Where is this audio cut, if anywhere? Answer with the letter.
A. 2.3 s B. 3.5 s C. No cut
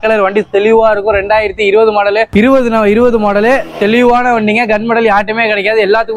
A